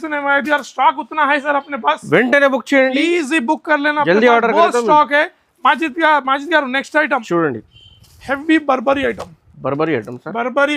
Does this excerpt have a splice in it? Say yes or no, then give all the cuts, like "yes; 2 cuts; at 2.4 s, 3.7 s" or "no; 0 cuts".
no; 0 cuts